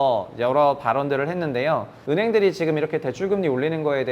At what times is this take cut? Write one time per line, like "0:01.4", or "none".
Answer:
0:01.9